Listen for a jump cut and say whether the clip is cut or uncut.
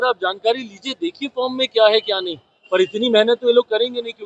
uncut